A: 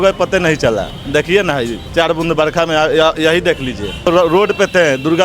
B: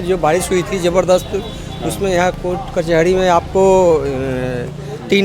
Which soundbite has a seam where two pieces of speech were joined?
A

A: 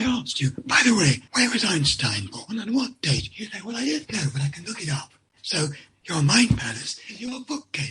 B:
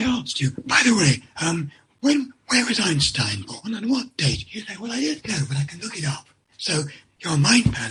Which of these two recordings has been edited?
A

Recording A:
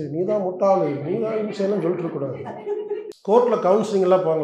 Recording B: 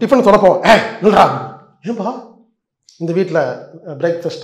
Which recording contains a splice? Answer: A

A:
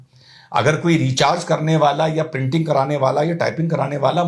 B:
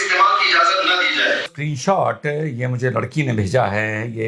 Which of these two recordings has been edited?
B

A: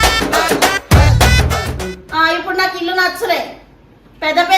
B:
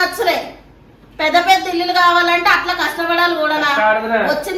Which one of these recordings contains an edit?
A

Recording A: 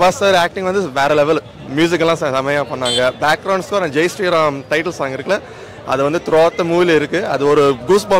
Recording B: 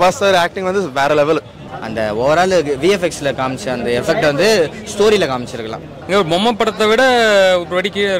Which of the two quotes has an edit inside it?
B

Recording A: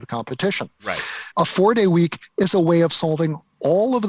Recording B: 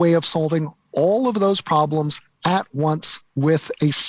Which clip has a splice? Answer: A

